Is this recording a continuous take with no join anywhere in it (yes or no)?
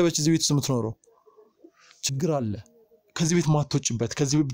yes